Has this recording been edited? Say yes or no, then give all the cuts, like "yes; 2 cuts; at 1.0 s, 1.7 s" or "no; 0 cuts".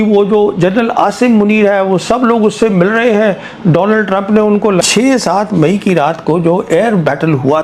yes; 1 cut; at 4.8 s